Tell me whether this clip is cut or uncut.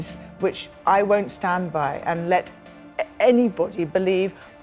uncut